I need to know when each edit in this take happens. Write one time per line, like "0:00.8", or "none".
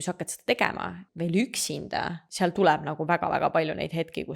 0:01.0
0:02.3